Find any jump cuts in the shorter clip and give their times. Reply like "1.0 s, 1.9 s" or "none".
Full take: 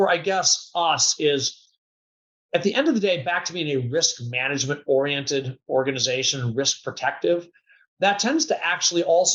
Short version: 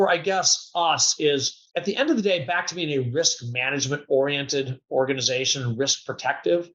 1.6 s